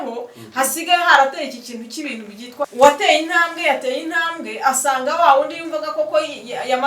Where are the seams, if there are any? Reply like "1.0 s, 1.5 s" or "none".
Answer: 2.7 s